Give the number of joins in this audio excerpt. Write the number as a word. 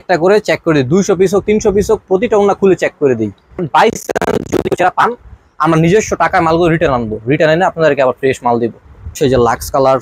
two